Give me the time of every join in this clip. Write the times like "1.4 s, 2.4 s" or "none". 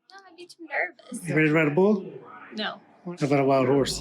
3.1 s

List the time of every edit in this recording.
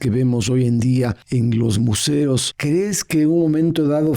1.2 s, 2.5 s

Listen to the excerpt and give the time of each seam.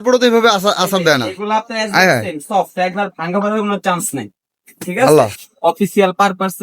5.4 s

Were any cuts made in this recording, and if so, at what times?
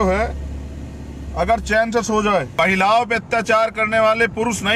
2.5 s

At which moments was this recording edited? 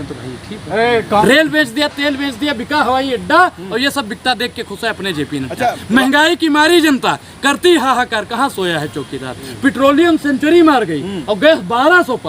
1.2 s

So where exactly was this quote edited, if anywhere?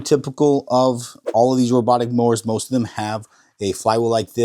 none

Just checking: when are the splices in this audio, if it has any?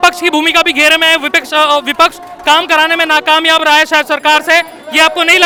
none

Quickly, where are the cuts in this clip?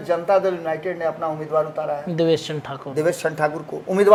none

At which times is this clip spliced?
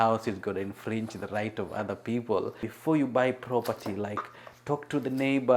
2.7 s

